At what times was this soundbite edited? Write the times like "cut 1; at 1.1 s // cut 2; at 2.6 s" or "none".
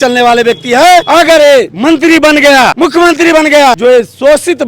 cut 1; at 1.1 s // cut 2; at 1.7 s // cut 3; at 2.7 s // cut 4; at 3.8 s